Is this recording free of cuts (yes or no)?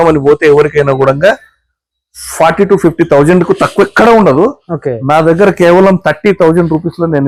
yes